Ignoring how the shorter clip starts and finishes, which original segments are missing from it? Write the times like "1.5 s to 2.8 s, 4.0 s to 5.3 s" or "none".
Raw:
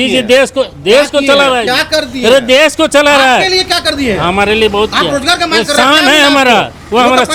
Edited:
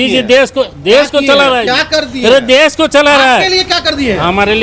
none